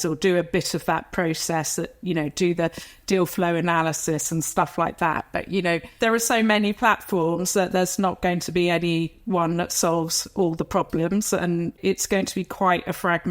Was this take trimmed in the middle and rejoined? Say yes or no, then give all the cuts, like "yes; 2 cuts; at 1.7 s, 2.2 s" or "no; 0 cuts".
yes; 1 cut; at 11.7 s